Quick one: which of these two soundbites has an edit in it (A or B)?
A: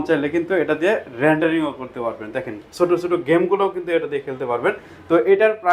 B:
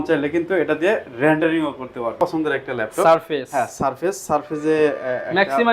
B